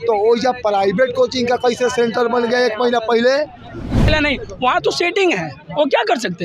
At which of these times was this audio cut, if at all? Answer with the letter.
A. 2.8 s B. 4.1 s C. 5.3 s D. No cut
B